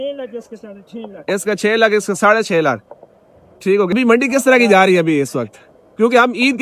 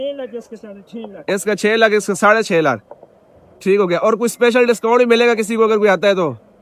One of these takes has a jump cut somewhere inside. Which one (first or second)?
first